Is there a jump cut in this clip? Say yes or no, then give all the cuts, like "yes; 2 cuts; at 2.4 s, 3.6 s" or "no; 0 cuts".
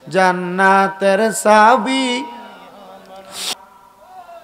yes; 1 cut; at 3.5 s